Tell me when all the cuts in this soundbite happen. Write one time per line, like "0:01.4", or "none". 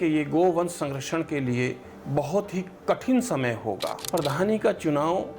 0:04.0